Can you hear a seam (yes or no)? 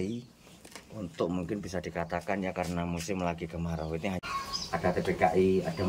yes